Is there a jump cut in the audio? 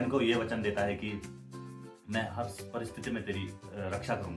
no; 0 cuts

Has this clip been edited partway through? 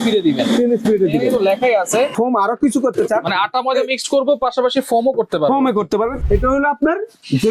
yes; 2 cuts; at 2.1 s, 6.2 s

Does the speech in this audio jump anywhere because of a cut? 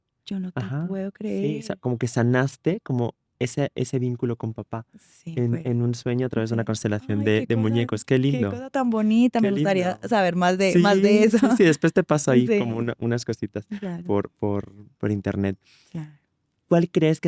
no; 0 cuts

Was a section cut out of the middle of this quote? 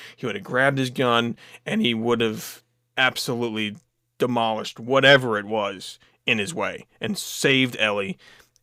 no; 0 cuts

